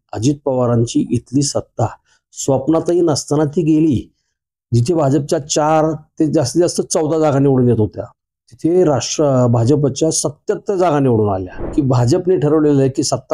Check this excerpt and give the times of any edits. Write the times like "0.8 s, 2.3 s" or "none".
11.5 s